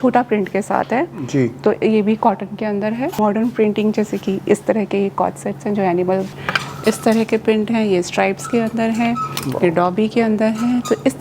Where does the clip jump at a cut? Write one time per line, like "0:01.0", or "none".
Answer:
0:03.2
0:06.4